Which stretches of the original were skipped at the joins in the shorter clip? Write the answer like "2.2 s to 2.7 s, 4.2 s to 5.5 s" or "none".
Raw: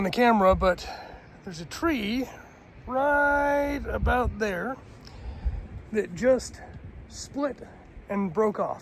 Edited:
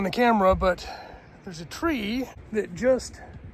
2.4 s to 5.8 s